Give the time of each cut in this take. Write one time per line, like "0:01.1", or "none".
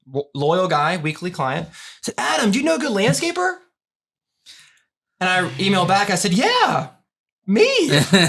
none